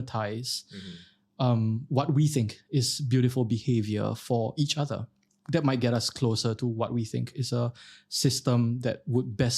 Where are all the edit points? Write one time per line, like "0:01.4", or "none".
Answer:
0:05.3